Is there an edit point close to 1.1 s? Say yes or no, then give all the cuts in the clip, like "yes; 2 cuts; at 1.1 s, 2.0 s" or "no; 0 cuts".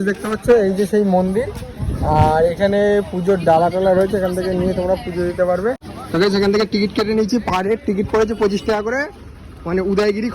no; 1 cut; at 5.9 s